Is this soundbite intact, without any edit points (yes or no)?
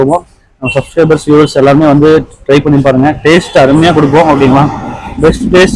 yes